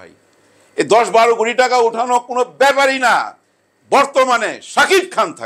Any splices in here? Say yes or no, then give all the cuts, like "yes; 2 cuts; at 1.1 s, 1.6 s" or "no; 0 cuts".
no; 0 cuts